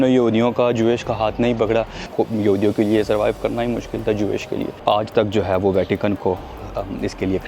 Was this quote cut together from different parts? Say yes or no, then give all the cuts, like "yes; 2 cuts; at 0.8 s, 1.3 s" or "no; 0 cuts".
yes; 2 cuts; at 2.0 s, 4.8 s